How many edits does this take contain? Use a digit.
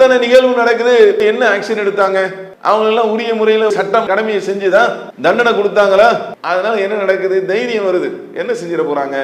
1